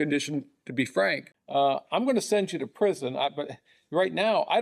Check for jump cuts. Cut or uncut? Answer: cut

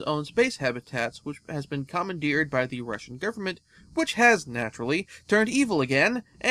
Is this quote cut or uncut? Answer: cut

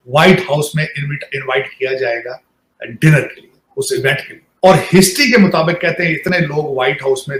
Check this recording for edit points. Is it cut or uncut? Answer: uncut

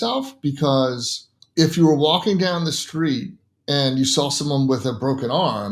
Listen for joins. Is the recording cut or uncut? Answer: uncut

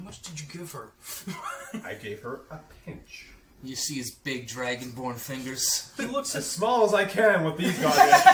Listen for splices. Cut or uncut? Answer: uncut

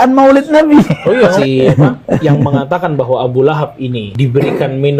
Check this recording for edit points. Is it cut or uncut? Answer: cut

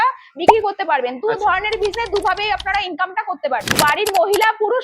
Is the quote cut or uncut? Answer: cut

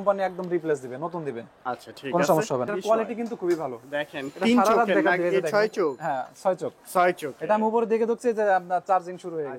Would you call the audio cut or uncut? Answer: cut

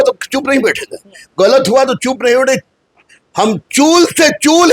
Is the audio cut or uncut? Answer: uncut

